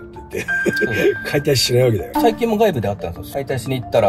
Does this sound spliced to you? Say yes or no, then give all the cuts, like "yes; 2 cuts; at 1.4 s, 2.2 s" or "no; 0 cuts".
yes; 2 cuts; at 2.2 s, 3.2 s